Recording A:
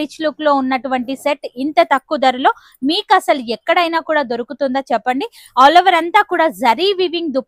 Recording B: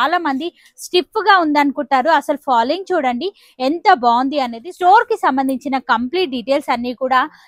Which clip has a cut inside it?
B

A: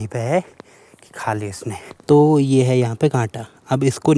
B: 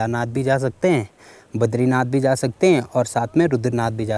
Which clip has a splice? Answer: A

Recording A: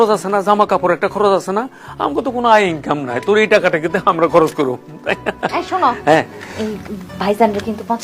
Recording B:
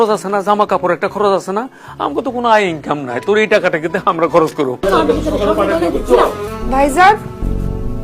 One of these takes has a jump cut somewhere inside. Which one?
B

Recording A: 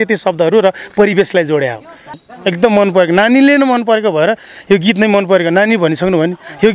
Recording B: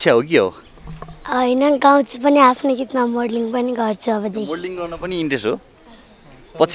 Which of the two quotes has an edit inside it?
A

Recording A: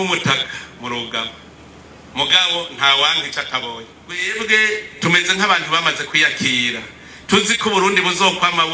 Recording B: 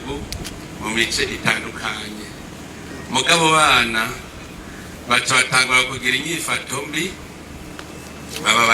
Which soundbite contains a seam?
A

